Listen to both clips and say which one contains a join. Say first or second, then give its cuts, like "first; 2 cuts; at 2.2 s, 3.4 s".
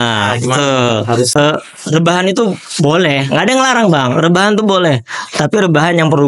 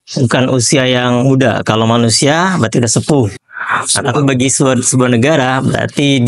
first; 1 cut; at 1.3 s